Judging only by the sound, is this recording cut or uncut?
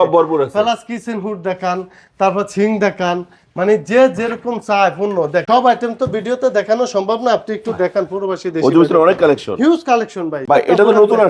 cut